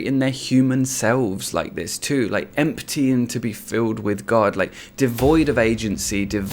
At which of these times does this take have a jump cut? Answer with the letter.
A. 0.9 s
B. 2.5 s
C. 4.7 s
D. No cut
B